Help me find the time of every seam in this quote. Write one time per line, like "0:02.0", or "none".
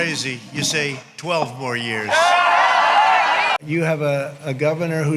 0:03.5